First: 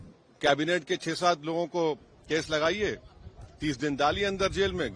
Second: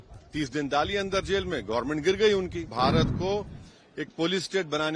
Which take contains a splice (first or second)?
second